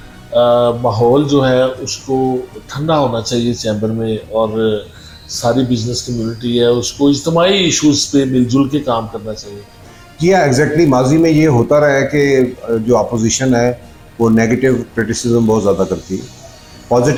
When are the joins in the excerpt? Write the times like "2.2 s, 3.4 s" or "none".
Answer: none

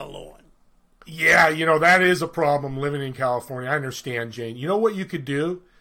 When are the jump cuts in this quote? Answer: none

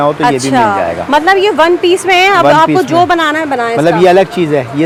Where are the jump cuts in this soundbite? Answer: none

